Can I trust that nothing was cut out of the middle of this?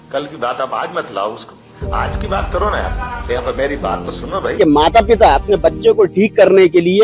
no; 1 cut; at 4.6 s

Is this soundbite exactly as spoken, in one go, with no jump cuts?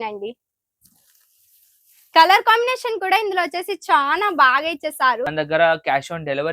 no; 1 cut; at 5.3 s

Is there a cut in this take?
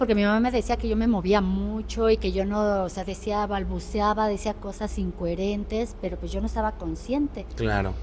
no; 0 cuts

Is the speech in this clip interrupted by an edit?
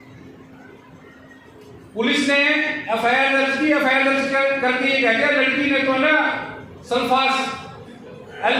no; 0 cuts

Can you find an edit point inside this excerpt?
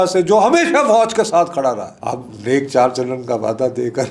yes; 1 cut; at 1.9 s

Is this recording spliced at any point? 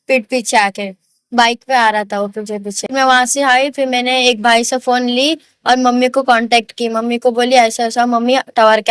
yes; 1 cut; at 2.9 s

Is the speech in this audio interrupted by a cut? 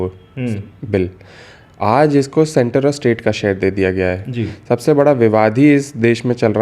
no; 0 cuts

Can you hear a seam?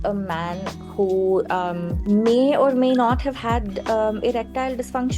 yes; 1 cut; at 1.9 s

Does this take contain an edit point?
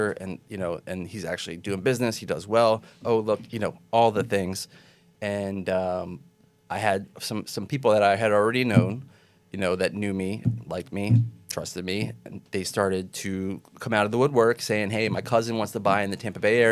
no; 0 cuts

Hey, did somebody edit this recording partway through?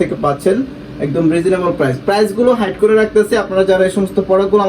no; 0 cuts

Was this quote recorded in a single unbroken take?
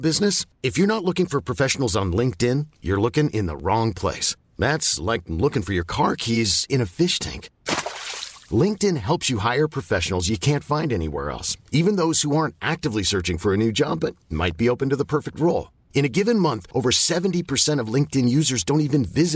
yes; 0 cuts

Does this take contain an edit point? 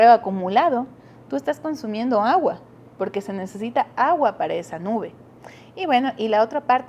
no; 0 cuts

